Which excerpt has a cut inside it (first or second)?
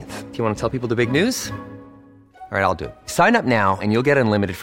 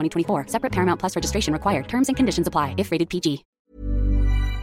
second